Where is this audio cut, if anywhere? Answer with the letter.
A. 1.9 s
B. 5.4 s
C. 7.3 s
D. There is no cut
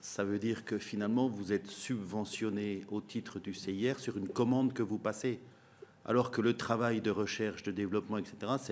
D